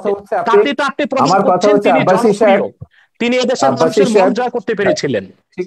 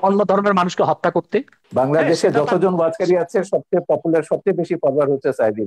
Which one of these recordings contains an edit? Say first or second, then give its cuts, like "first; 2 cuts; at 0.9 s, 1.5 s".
second; 1 cut; at 1.6 s